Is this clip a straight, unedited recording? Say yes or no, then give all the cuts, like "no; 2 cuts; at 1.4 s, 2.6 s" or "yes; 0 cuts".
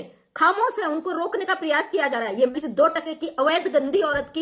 no; 1 cut; at 2.5 s